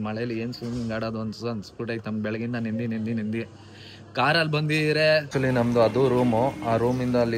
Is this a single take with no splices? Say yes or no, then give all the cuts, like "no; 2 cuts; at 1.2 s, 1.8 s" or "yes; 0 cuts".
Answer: no; 1 cut; at 5.3 s